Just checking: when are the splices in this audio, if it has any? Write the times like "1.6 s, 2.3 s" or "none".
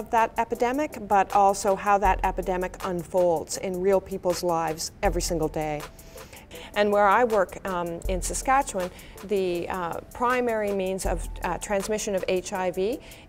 6.5 s